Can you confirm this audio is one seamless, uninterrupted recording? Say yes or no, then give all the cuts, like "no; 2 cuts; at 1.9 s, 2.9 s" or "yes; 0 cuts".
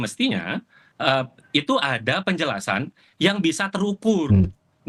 yes; 0 cuts